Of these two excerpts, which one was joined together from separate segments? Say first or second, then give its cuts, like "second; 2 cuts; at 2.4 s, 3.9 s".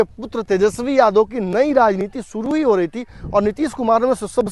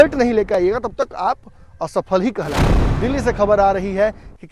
second; 1 cut; at 2.6 s